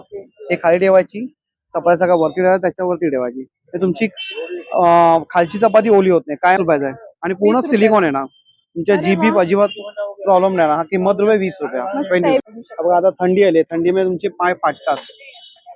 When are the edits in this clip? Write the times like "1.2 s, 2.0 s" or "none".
6.6 s, 12.4 s